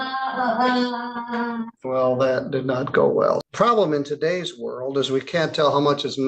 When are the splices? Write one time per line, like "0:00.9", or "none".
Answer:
0:01.7
0:03.4